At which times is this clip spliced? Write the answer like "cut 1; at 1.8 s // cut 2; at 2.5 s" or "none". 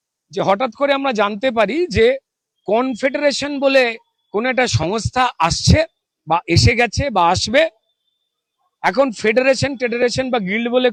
none